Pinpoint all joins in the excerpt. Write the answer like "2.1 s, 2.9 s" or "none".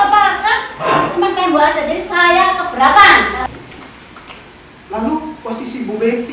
3.5 s